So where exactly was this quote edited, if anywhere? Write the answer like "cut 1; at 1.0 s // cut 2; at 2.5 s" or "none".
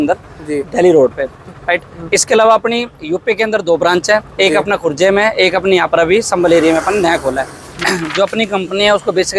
cut 1; at 7.7 s